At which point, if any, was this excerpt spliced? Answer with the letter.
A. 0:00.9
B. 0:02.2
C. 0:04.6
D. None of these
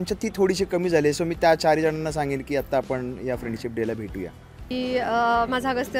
C